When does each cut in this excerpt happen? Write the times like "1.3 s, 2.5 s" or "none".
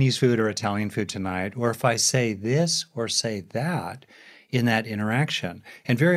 none